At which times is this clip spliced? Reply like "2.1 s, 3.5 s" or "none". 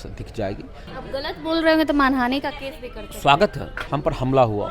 1.0 s, 3.8 s